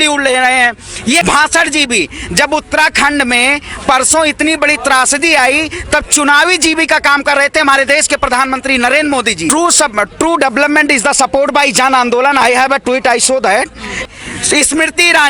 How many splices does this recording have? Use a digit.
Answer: 3